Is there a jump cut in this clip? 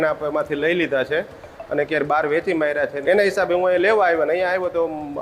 yes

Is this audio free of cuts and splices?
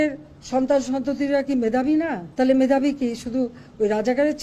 no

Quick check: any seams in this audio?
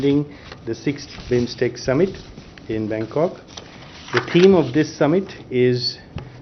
no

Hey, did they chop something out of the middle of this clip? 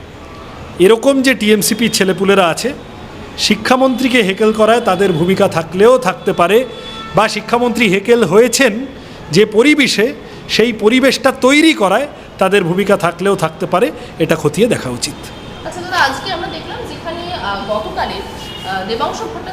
no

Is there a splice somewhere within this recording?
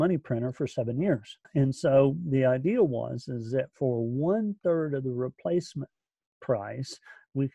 yes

